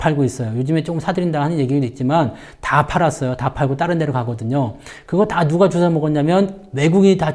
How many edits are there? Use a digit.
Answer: 0